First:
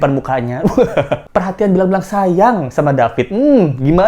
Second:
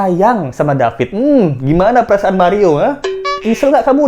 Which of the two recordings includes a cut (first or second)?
first